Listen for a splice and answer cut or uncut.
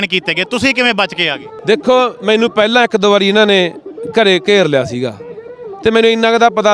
cut